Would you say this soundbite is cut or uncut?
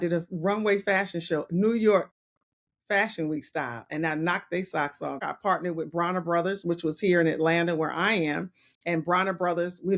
cut